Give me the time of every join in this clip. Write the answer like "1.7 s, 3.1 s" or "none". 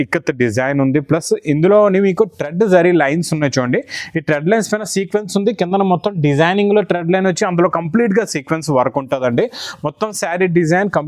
none